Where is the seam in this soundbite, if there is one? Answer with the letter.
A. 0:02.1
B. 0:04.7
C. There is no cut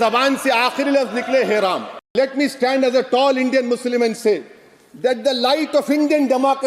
A